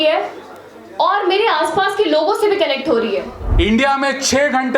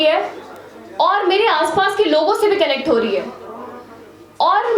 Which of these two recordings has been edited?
first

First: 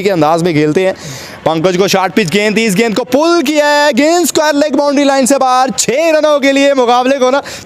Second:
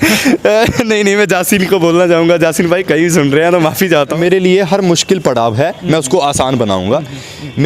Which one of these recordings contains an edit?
second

